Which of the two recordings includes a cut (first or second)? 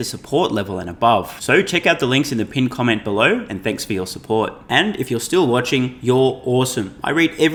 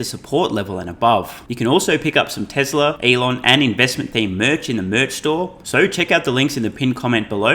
second